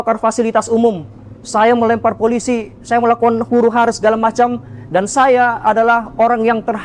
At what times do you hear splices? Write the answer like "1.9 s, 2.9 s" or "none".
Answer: none